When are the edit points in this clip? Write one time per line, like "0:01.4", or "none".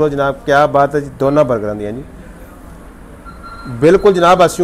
none

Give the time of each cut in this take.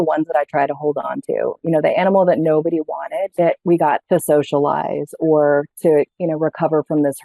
0:04.0

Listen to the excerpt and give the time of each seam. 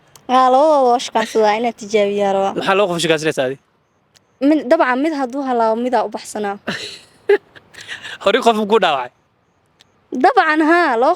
0:02.5

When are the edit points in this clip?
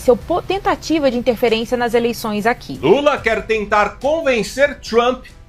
0:02.7

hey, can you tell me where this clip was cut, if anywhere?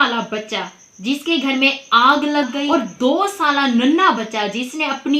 0:02.7

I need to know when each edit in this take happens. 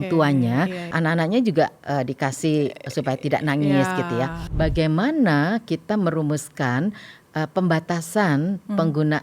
0:00.9
0:04.4

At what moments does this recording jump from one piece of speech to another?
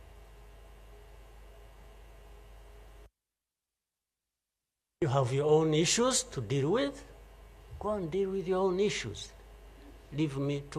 none

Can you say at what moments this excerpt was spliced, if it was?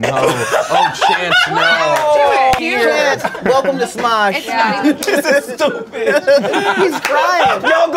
0:02.6
0:05.0

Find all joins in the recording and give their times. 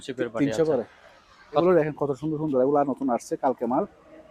0:01.6

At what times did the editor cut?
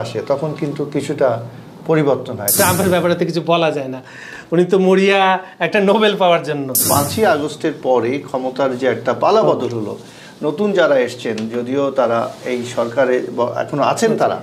0:02.5
0:06.8

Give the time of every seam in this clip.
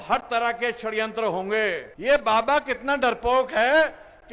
0:01.9

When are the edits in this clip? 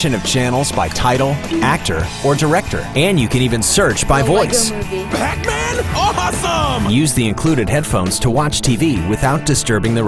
none

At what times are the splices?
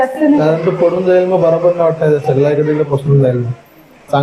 none

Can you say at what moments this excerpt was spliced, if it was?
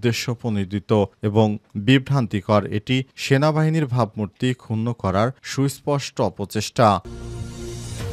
0:07.1

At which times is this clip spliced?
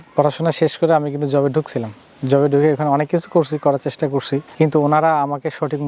none

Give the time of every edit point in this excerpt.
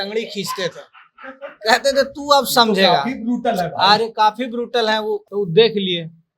0:05.2

